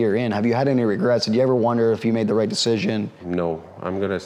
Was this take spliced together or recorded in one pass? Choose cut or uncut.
uncut